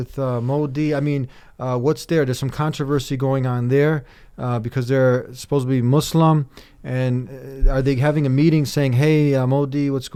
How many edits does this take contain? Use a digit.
0